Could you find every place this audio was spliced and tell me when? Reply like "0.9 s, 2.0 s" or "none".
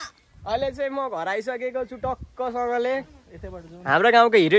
none